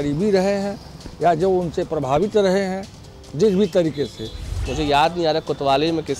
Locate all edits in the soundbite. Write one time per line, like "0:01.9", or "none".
0:04.6